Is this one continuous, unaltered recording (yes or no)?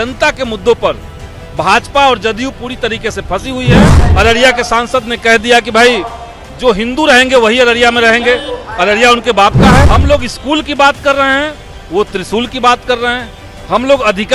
no